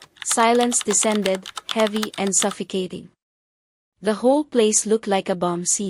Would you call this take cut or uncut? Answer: uncut